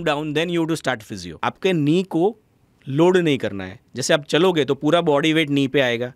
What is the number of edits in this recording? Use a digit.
1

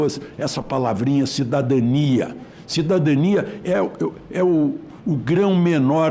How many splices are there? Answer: 0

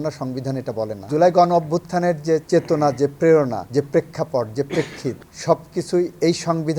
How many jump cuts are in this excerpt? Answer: 3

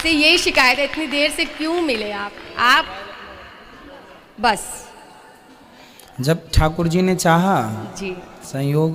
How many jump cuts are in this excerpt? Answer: 0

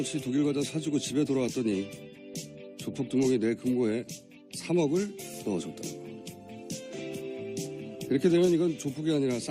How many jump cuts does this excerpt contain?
0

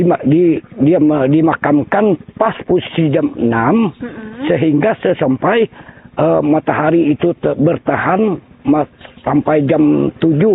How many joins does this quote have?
0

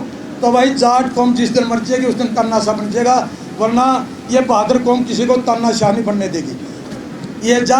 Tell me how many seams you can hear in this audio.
1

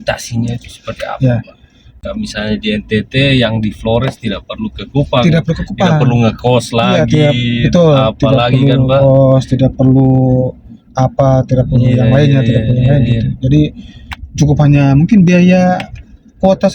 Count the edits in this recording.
1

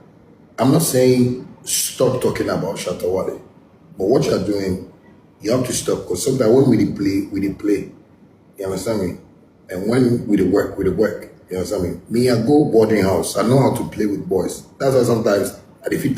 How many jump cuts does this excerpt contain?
1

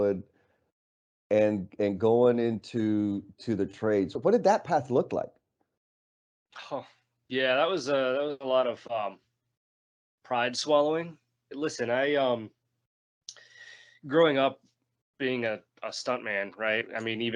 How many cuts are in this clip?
2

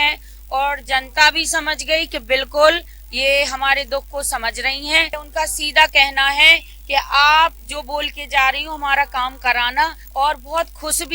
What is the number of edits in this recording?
2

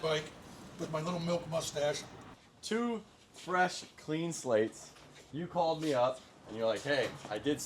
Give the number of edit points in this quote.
1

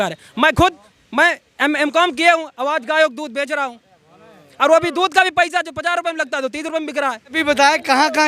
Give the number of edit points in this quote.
1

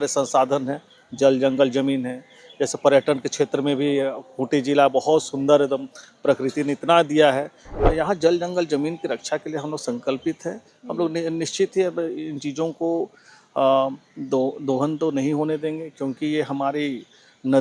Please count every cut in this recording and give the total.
1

